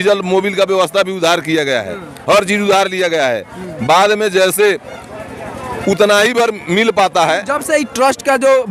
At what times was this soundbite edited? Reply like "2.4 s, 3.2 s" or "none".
none